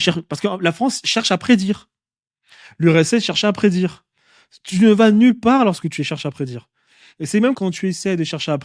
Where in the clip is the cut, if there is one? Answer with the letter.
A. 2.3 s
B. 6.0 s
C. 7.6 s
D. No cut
C